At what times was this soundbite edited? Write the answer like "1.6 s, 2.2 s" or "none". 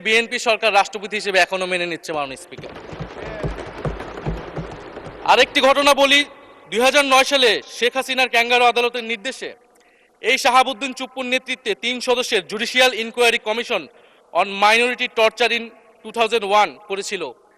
none